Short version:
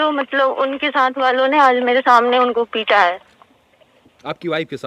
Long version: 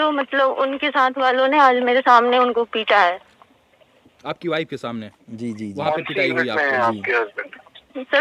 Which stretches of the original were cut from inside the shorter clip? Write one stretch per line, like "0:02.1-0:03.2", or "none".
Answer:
none